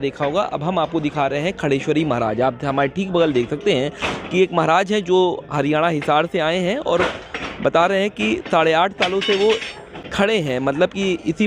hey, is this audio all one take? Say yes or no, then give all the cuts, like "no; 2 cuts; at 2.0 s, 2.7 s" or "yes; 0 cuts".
yes; 0 cuts